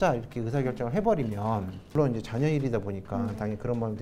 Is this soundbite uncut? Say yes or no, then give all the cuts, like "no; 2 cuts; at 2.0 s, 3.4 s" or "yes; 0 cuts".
no; 1 cut; at 1.8 s